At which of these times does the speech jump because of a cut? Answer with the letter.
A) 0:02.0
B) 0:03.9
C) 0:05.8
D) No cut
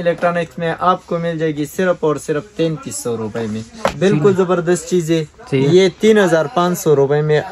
B